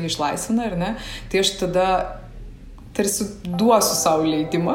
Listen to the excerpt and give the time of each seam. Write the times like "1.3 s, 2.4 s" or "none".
none